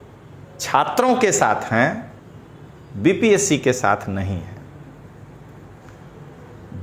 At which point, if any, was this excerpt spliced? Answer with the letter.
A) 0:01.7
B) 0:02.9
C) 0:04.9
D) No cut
D